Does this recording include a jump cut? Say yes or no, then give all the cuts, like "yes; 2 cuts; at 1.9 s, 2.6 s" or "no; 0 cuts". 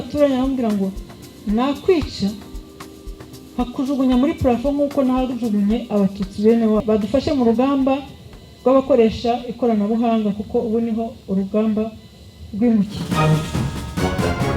yes; 2 cuts; at 6.8 s, 13.0 s